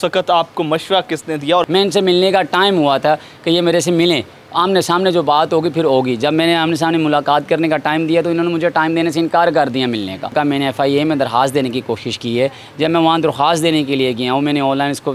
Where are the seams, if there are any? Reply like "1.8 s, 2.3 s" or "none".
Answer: 1.6 s, 10.3 s